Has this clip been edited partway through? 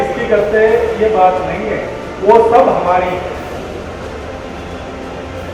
no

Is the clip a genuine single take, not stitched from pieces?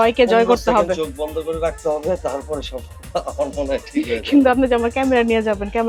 yes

